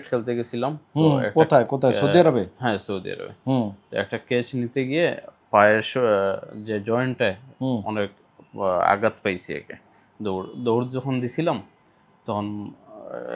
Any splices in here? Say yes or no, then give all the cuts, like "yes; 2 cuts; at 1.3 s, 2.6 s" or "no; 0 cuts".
no; 0 cuts